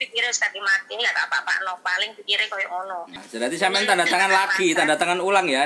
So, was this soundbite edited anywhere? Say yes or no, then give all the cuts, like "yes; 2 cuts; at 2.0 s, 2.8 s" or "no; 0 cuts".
yes; 1 cut; at 3.2 s